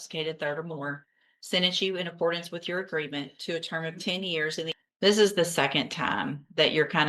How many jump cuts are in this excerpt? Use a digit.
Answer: 1